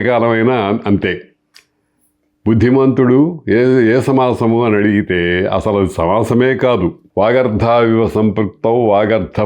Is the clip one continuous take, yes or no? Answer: no